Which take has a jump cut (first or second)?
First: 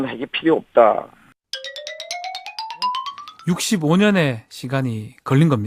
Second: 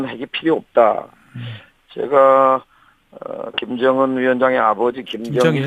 first